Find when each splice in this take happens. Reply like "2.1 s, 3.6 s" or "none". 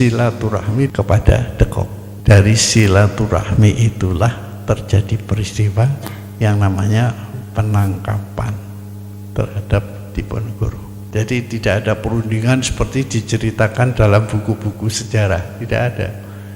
0.9 s, 2.0 s, 11.0 s